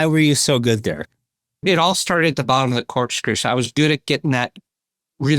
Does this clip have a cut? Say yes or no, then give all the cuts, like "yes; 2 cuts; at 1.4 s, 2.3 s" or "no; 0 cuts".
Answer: yes; 1 cut; at 1.6 s